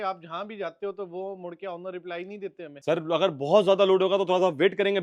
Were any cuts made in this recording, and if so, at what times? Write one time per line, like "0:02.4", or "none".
0:02.7